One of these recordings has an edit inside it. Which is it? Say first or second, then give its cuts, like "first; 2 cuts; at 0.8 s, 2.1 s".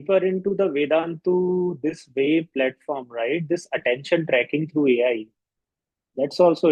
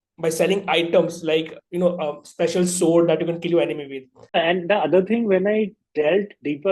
second; 1 cut; at 4.4 s